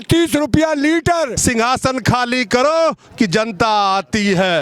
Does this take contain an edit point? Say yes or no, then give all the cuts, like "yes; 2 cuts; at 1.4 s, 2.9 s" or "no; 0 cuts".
yes; 1 cut; at 1.4 s